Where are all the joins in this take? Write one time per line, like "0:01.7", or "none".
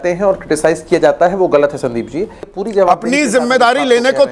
0:02.4